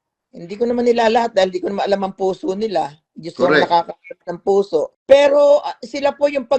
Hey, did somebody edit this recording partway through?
yes; 1 cut; at 4.9 s

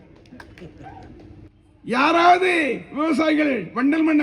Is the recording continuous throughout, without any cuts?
no; 1 cut; at 1.4 s

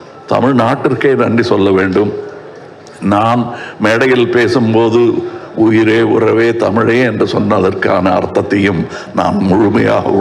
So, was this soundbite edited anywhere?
no; 0 cuts

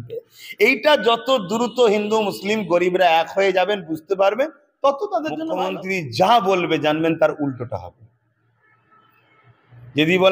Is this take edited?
yes; 1 cut; at 5.6 s

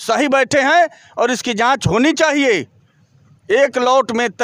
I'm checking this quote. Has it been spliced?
no; 0 cuts

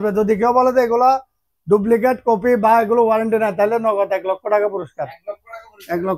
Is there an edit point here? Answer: no; 0 cuts

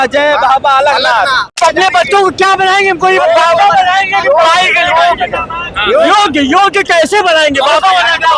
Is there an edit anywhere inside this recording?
yes; 1 cut; at 1.6 s

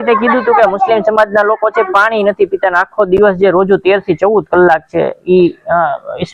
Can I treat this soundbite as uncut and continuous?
yes; 0 cuts

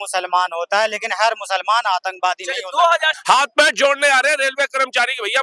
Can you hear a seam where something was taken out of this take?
yes; 1 cut; at 3.1 s

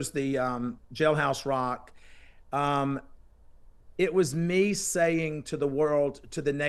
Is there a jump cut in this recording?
no; 0 cuts

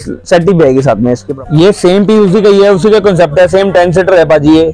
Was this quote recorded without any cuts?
no; 1 cut; at 1.3 s

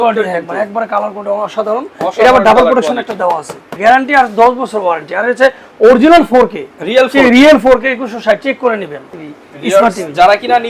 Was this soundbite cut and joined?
yes; 2 cuts; at 3.7 s, 9.1 s

